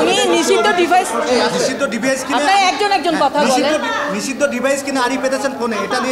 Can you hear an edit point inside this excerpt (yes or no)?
no